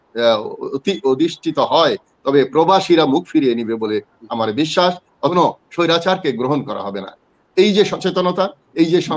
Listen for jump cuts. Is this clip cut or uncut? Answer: cut